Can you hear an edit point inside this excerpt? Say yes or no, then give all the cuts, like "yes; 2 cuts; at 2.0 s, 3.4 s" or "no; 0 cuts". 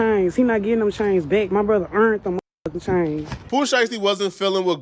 no; 0 cuts